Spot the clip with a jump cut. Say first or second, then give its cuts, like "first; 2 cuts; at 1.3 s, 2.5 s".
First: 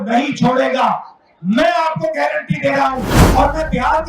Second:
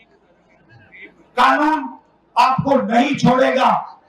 first; 1 cut; at 3.2 s